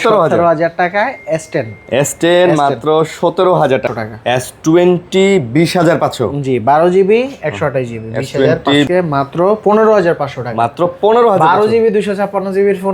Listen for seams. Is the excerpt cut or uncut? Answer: cut